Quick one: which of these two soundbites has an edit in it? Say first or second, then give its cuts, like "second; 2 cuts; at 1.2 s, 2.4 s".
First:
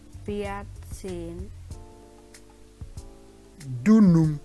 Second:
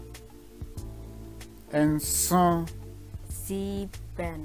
first; 2 cuts; at 1.5 s, 3.5 s